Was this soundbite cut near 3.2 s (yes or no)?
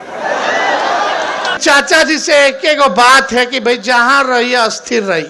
no